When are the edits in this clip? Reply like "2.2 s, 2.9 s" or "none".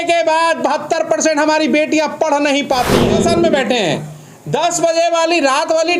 3.1 s